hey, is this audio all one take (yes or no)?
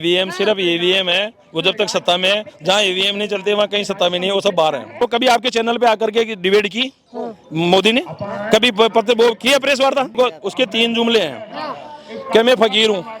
no